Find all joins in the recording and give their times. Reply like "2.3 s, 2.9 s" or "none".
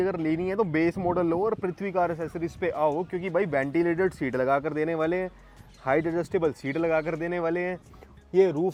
none